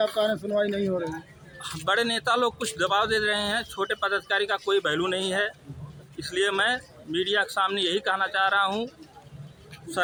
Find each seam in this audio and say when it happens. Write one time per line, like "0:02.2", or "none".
none

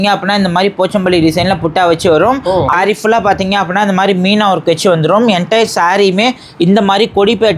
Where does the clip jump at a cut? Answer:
0:02.7

